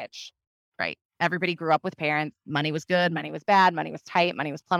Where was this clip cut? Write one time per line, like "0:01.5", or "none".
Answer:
none

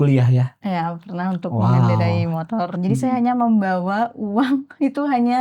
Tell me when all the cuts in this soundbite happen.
0:02.7

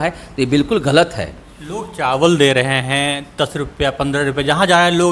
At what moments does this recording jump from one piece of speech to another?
none

